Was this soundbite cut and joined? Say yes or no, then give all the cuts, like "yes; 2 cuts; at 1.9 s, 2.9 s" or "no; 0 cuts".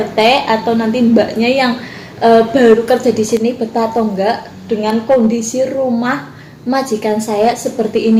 no; 0 cuts